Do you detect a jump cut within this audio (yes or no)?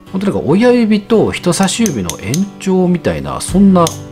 no